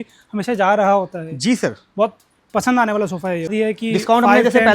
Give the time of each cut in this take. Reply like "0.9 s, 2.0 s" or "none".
3.5 s